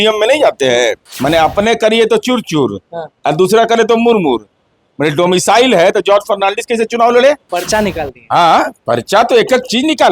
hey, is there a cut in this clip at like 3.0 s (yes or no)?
no